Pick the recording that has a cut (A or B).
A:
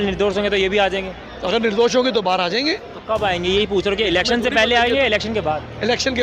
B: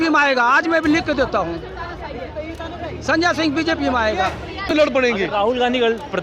B